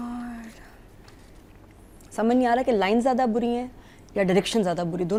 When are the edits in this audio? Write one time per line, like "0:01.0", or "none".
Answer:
none